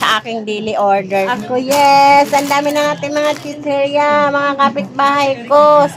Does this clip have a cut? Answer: yes; 1 cut; at 1.4 s

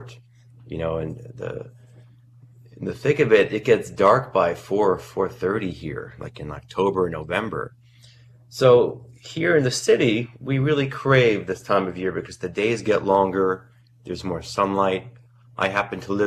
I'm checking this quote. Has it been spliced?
yes; 1 cut; at 14.5 s

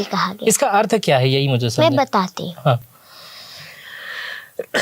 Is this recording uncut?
yes; 0 cuts

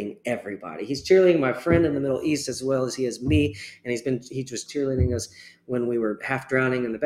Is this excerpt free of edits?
no; 1 cut; at 4.6 s

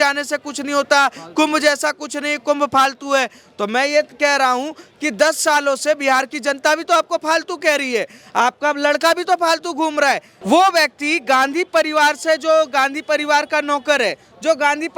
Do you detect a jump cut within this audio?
yes; 1 cut; at 10.3 s

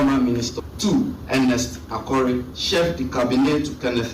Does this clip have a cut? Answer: yes; 2 cuts; at 1.0 s, 2.6 s

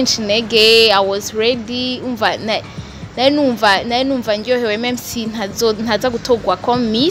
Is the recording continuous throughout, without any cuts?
yes; 0 cuts

